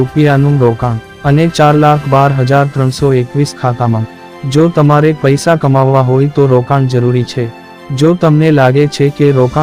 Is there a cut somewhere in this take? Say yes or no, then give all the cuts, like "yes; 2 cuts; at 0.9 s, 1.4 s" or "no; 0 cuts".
no; 0 cuts